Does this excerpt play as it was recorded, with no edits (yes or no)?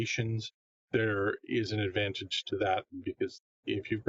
yes